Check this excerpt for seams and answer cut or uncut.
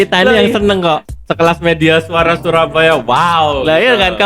cut